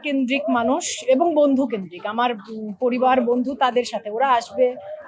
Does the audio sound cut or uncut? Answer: uncut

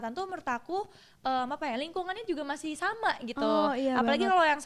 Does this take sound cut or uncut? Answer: uncut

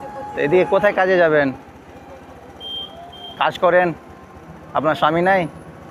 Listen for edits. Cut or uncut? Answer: uncut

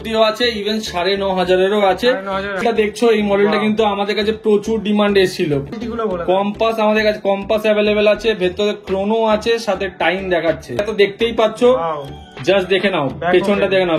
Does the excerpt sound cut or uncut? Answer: cut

